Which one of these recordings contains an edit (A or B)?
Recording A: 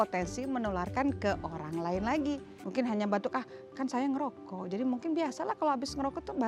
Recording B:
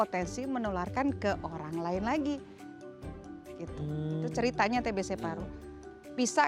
A